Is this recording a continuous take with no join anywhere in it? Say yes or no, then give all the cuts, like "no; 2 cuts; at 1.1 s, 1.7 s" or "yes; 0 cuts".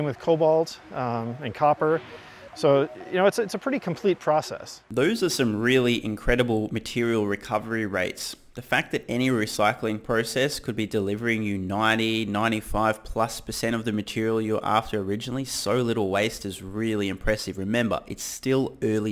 yes; 0 cuts